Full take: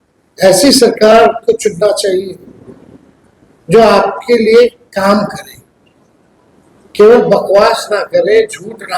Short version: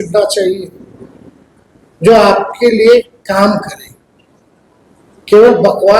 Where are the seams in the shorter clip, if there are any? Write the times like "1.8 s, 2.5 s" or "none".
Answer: none